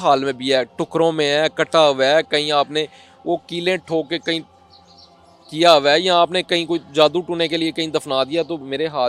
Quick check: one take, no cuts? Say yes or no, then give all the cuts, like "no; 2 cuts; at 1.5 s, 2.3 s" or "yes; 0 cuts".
yes; 0 cuts